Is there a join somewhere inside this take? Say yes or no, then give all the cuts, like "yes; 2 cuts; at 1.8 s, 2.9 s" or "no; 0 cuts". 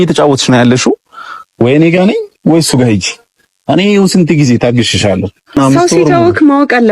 yes; 1 cut; at 5.6 s